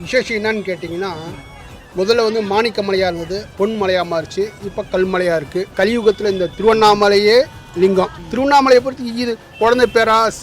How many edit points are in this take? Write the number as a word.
three